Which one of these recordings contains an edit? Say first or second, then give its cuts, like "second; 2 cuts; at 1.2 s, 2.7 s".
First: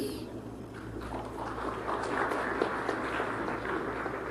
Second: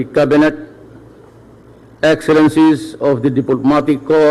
second; 1 cut; at 2.7 s